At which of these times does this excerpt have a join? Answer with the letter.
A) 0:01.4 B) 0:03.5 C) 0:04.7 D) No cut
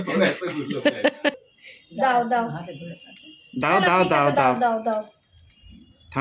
A